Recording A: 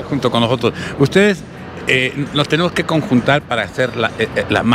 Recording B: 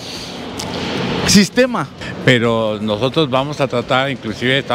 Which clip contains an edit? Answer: B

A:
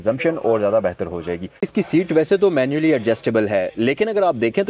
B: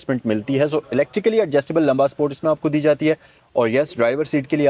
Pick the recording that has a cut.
A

